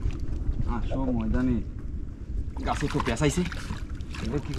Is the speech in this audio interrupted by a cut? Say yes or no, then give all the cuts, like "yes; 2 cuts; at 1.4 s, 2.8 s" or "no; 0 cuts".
no; 0 cuts